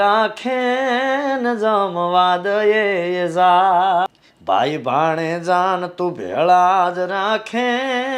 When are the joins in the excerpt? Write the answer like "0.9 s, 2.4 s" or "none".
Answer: 4.1 s